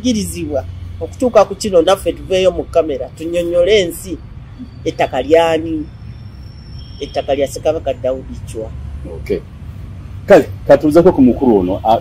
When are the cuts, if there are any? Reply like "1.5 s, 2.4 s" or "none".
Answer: none